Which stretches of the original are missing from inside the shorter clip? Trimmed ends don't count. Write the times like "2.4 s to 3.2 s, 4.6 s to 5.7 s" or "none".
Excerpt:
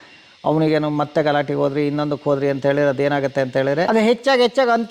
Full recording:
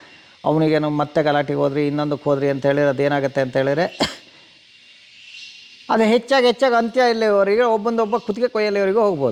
3.9 s to 5.9 s